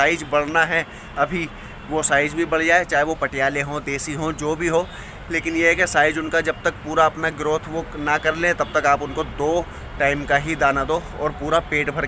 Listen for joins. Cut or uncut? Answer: uncut